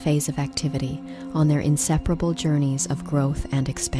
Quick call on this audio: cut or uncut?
uncut